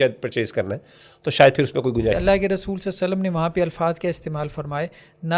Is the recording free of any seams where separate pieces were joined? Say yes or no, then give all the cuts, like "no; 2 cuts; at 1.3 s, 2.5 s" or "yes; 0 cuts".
no; 1 cut; at 2.2 s